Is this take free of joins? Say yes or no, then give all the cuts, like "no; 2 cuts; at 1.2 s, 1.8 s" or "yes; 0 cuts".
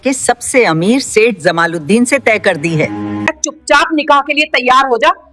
no; 1 cut; at 3.1 s